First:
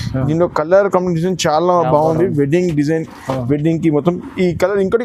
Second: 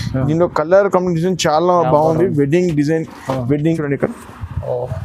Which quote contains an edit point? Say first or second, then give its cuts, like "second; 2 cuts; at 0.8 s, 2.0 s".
second; 1 cut; at 3.8 s